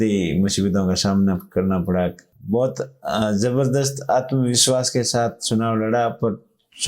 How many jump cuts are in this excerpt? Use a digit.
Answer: 1